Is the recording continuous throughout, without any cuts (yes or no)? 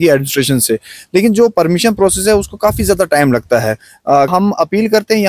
no